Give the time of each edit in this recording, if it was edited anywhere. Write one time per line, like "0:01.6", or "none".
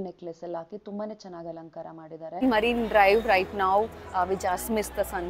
0:02.4